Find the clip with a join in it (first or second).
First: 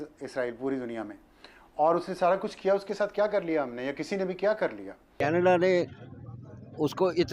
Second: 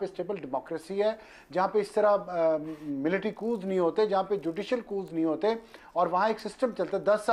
first